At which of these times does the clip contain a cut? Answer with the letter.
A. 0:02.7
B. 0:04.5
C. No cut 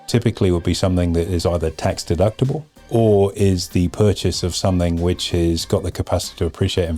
A